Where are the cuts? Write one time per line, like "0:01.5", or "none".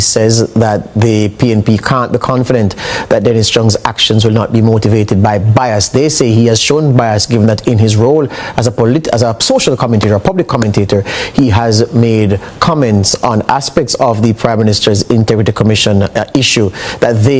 none